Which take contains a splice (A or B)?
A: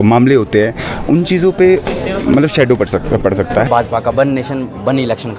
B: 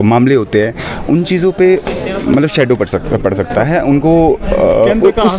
A